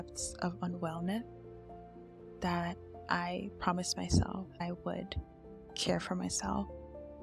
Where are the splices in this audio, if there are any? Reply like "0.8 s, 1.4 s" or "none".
4.6 s